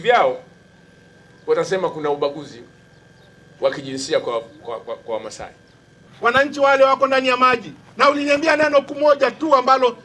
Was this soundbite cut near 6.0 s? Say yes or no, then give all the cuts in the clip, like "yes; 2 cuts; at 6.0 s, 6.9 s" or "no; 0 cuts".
yes; 1 cut; at 6.0 s